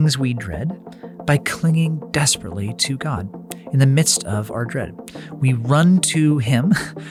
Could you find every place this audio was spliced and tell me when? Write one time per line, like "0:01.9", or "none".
none